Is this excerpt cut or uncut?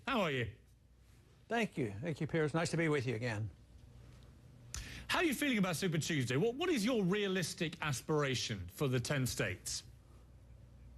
cut